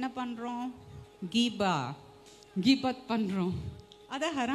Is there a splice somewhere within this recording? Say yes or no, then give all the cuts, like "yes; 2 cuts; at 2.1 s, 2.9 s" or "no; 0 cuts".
no; 0 cuts